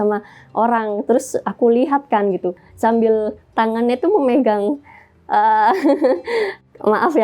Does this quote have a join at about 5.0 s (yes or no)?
no